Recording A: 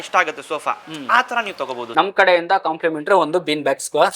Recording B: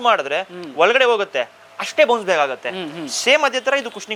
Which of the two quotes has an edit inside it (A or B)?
A